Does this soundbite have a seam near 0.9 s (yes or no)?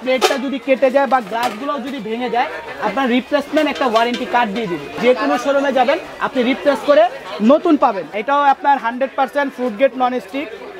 no